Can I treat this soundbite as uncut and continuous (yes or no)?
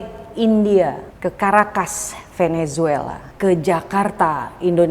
no